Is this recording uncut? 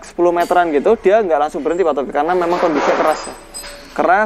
yes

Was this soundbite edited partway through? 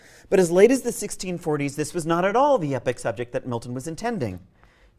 no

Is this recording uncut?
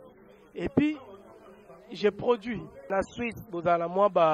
no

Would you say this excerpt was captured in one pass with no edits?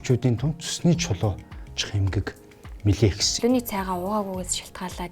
no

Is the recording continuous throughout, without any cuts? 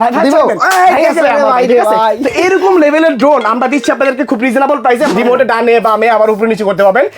no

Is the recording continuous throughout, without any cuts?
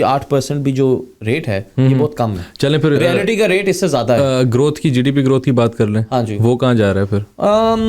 yes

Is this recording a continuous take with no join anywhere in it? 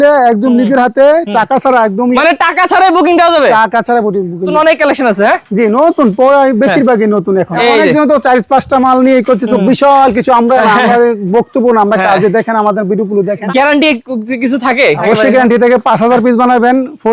no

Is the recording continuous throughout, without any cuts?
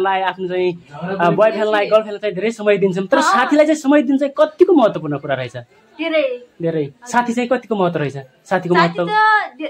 yes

